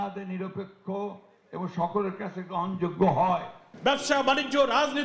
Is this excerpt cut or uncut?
cut